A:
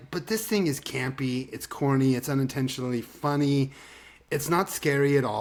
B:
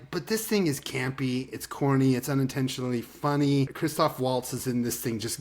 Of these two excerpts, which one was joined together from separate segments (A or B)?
B